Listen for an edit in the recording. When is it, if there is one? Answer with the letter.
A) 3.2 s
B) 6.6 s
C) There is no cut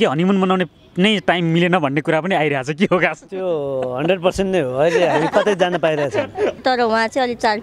B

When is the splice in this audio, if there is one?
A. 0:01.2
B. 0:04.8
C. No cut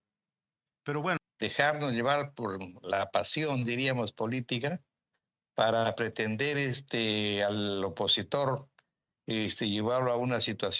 A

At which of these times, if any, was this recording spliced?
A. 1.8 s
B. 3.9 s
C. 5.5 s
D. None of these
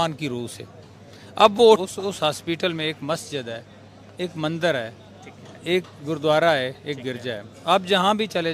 A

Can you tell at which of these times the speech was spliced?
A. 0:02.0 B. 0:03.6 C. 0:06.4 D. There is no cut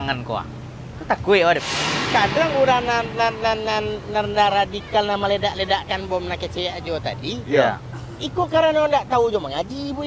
A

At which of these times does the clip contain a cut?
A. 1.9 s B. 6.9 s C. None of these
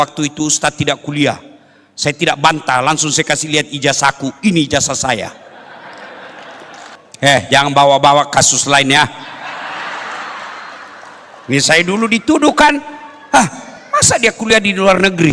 B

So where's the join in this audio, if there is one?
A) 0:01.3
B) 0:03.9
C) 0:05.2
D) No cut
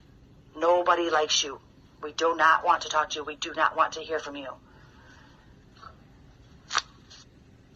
D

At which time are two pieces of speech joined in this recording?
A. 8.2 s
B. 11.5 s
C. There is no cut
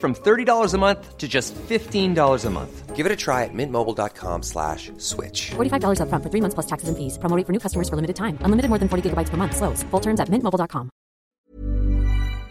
B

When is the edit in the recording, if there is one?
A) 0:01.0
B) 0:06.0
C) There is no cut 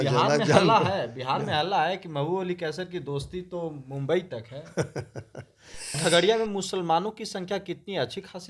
B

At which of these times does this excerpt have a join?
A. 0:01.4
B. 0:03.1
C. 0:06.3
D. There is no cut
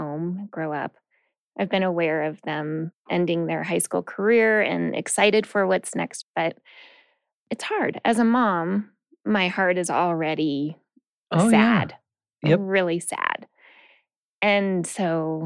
A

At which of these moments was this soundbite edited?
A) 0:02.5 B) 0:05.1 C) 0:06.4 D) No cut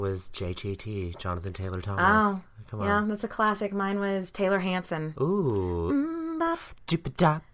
B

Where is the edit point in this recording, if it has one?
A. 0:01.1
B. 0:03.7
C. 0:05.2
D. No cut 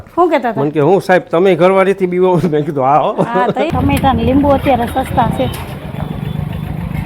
B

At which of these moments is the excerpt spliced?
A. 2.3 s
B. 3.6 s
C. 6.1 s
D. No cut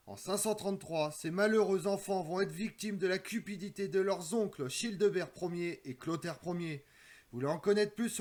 D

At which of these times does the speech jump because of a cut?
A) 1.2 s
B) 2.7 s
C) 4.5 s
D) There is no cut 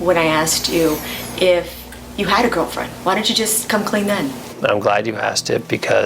C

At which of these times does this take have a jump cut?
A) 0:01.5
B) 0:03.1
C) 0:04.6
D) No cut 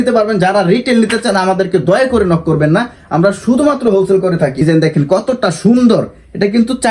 C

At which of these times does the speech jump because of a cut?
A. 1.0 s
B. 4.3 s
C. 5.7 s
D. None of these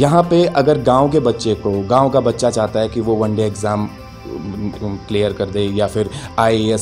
D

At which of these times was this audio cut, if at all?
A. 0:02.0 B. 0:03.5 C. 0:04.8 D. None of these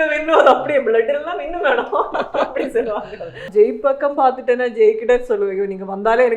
B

